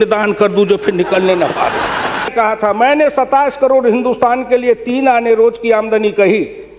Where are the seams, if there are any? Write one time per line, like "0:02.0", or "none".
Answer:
0:02.3